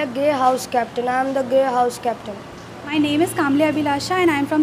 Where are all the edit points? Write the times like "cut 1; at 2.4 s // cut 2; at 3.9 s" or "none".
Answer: cut 1; at 2.6 s